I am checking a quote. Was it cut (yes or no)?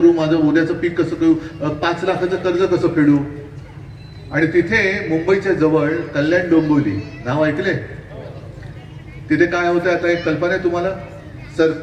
no